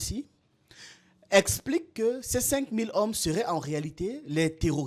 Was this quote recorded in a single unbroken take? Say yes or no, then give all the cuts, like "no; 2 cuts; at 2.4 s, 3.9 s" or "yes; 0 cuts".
yes; 0 cuts